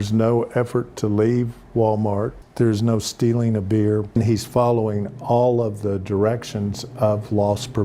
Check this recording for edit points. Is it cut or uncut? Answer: cut